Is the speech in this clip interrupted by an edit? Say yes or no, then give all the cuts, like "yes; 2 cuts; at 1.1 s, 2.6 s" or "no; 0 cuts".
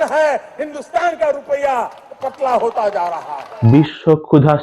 yes; 1 cut; at 3.5 s